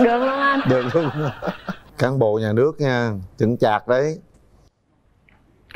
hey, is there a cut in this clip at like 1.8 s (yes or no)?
yes